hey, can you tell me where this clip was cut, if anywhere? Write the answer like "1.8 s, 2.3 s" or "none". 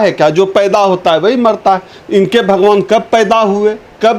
none